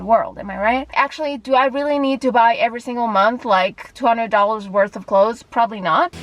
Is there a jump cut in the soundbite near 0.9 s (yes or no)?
yes